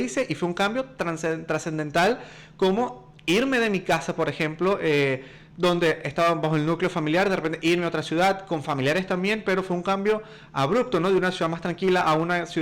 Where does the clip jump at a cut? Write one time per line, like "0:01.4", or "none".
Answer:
none